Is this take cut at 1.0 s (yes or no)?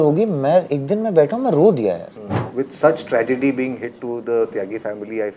no